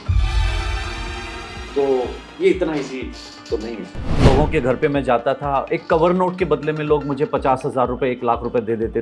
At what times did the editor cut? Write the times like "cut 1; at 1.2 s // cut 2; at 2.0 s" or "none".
cut 1; at 4.1 s